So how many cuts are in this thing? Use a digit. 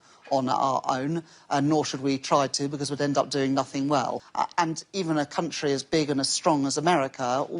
1